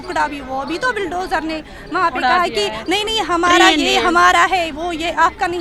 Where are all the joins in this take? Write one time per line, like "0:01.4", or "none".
none